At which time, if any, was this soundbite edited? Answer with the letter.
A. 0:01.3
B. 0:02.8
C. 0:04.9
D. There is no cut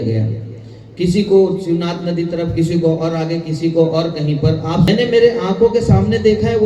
C